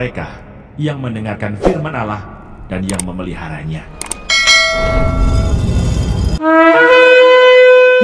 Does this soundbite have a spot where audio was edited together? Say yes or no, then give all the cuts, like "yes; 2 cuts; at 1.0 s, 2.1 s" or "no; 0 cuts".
no; 0 cuts